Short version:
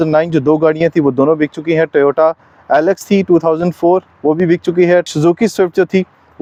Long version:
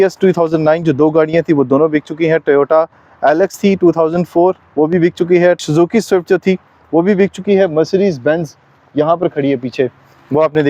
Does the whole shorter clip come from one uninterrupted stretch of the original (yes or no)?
yes